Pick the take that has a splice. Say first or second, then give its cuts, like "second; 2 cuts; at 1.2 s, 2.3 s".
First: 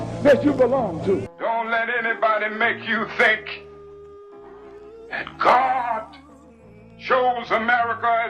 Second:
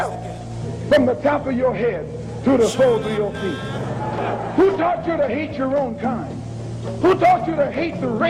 first; 1 cut; at 1.3 s